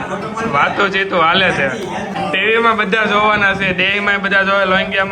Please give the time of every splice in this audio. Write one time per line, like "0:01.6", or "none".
0:02.2